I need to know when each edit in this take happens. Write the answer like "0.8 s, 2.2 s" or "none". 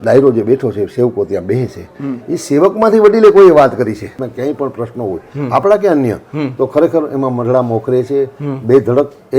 4.2 s